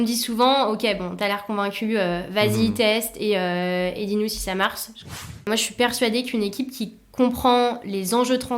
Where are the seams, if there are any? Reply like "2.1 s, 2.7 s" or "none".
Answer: 5.4 s